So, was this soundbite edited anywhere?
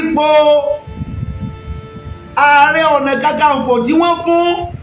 no; 0 cuts

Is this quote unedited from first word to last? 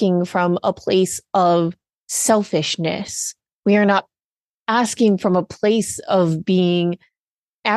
yes; 0 cuts

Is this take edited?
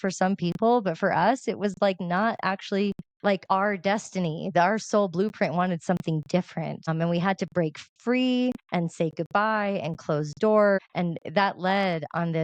yes; 4 cuts; at 3.3 s, 6.9 s, 8.6 s, 10.8 s

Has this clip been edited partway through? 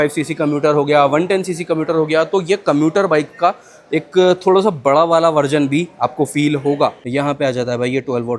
yes; 1 cut; at 7.0 s

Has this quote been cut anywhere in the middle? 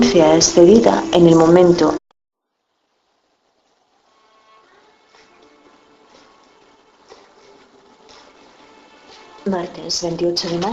no; 0 cuts

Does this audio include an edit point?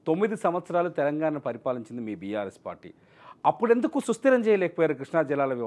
no; 0 cuts

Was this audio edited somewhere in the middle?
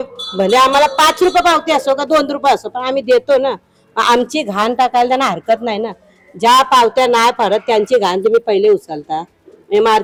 no; 0 cuts

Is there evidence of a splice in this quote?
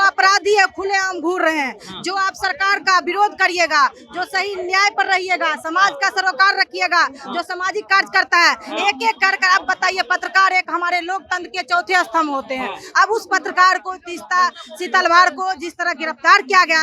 no; 0 cuts

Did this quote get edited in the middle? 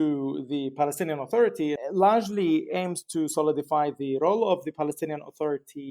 yes; 1 cut; at 1.8 s

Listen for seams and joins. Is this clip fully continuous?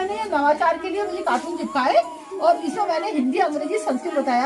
yes; 0 cuts

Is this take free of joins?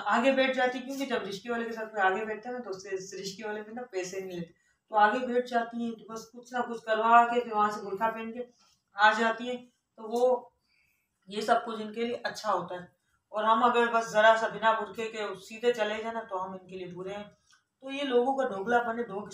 yes; 0 cuts

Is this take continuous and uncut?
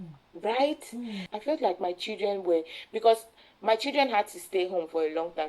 no; 1 cut; at 1.2 s

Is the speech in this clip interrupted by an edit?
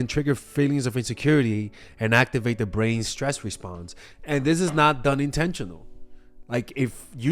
no; 0 cuts

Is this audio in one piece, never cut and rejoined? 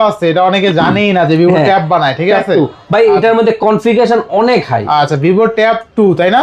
yes; 0 cuts

